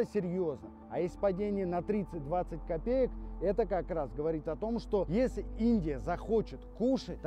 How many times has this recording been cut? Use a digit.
1